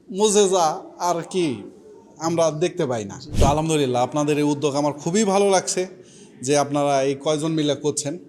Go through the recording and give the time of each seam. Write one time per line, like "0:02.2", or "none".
0:03.2